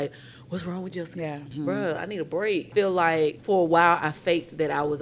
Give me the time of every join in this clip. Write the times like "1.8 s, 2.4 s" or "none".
1.5 s, 2.7 s, 3.4 s